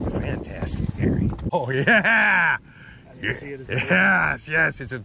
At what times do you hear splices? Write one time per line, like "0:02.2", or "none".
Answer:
0:01.5